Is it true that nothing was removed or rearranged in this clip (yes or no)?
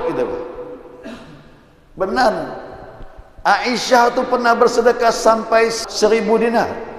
no